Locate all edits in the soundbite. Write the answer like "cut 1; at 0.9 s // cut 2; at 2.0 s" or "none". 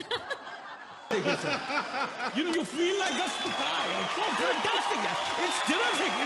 cut 1; at 1.1 s